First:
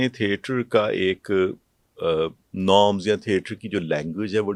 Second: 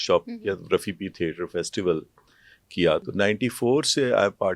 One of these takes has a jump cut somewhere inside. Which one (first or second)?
second